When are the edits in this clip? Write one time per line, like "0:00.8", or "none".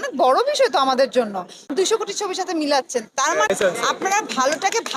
none